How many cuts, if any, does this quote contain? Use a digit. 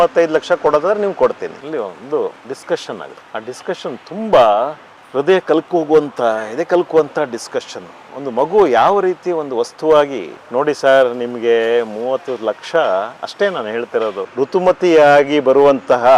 2